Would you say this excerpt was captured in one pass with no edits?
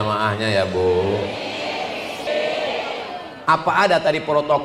no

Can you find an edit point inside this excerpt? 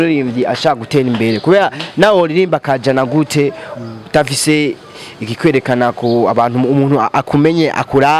no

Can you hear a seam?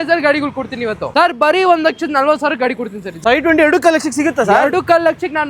yes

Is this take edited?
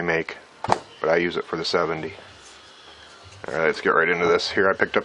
yes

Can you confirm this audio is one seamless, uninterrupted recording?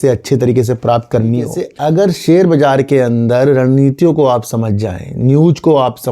no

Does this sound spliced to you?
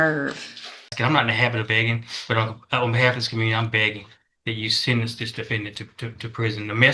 yes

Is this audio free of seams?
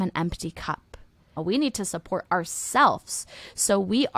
no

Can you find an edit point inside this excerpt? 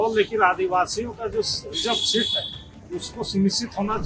no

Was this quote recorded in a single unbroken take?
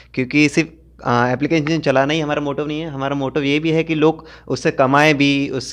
yes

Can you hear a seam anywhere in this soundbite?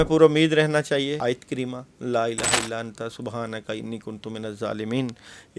yes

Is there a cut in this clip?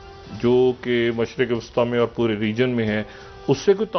no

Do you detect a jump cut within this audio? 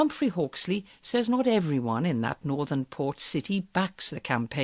yes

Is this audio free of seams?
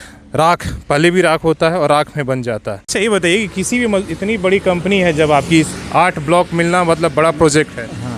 no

